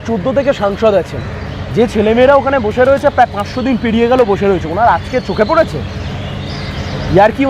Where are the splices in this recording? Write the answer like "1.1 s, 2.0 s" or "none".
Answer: none